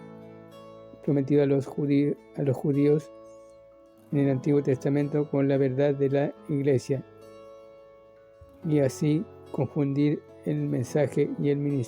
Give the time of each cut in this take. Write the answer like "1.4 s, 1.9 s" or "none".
1.0 s